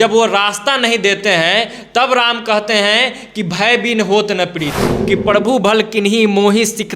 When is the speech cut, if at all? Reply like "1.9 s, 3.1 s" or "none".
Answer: 4.9 s